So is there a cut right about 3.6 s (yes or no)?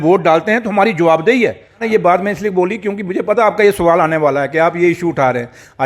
no